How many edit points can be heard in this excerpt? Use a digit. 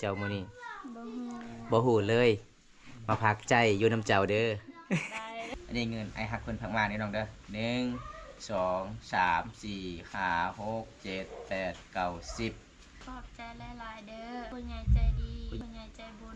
4